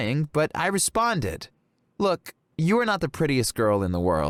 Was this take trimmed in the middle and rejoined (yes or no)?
no